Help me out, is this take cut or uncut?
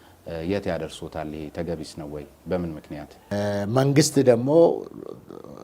cut